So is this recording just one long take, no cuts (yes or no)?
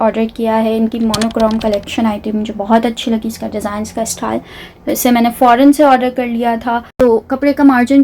no